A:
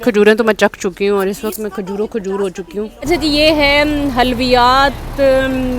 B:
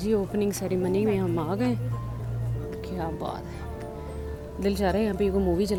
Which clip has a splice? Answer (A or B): A